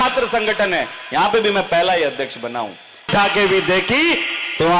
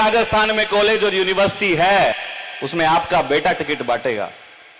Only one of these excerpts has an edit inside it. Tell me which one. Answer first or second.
first